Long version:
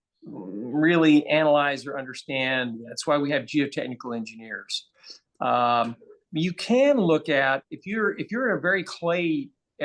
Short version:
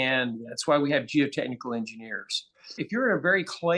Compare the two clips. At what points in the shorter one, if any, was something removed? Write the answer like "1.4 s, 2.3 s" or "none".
2.8 s